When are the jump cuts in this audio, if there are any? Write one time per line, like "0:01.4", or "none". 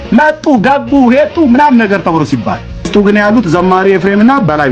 0:02.9